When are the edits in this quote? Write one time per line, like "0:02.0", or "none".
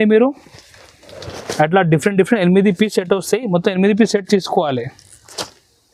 none